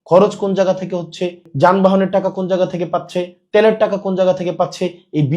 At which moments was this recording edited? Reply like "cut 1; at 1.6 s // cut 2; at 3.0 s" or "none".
cut 1; at 1.5 s

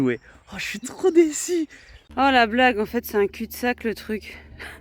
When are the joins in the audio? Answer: cut 1; at 2.1 s

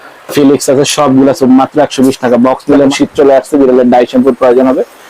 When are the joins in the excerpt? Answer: cut 1; at 2.9 s

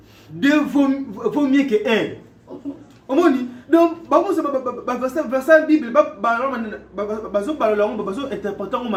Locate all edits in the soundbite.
none

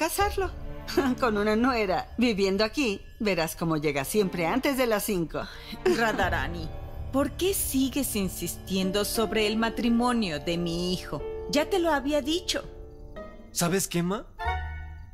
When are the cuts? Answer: cut 1; at 13.1 s

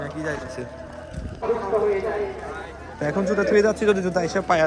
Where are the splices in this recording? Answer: cut 1; at 1.4 s // cut 2; at 3.0 s

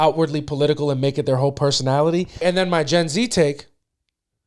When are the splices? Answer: cut 1; at 2.4 s

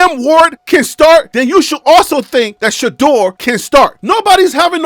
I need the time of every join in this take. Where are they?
cut 1; at 4.0 s

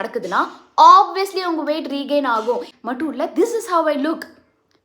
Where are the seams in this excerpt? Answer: cut 1; at 2.7 s

